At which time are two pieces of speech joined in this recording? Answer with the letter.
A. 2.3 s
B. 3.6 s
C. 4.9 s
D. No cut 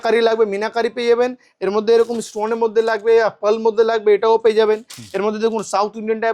D